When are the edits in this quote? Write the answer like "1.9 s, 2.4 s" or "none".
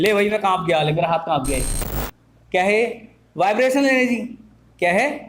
none

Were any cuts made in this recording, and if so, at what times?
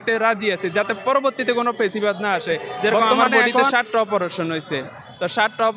3.7 s

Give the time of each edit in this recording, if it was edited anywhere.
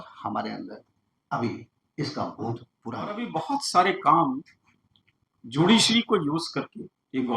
3.1 s

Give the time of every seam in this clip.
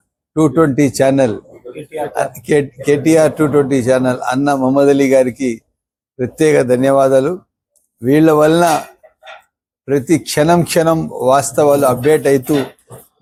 none

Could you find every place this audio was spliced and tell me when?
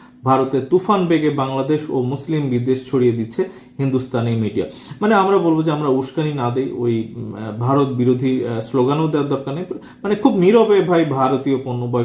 none

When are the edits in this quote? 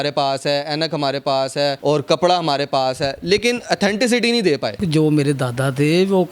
1.8 s, 4.8 s

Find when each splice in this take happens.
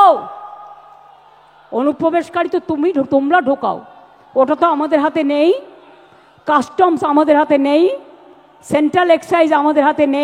none

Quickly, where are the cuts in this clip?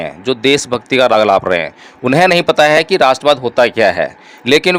none

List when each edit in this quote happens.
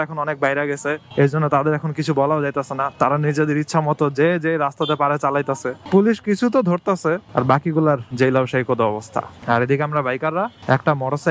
none

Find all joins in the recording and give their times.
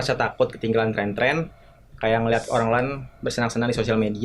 none

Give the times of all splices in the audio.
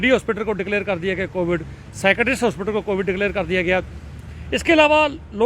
none

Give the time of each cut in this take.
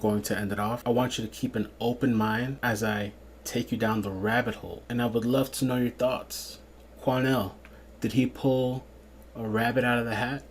0.8 s, 2.6 s, 4.7 s

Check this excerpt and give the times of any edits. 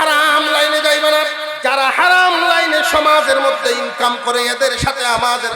1.4 s

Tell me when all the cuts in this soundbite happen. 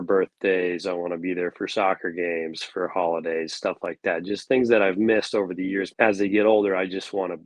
5.9 s

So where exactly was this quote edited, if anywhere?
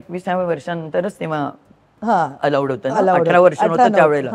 none

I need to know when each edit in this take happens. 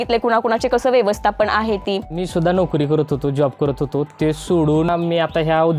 2.1 s, 4.9 s

